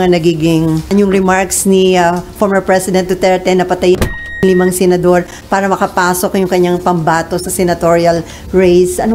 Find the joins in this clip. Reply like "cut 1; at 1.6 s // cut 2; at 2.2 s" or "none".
cut 1; at 0.9 s